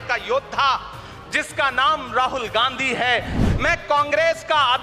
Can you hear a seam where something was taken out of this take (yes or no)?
yes